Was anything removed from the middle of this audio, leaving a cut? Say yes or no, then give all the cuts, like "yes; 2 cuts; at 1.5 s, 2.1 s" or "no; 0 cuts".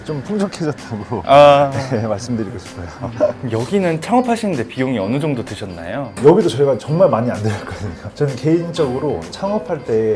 yes; 1 cut; at 3.4 s